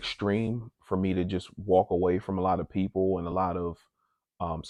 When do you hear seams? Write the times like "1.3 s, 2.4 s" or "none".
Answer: none